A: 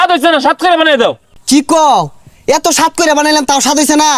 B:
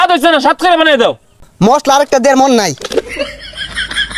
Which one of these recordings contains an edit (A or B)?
B